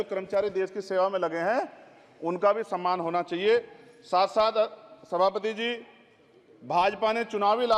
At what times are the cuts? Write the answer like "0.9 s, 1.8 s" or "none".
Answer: none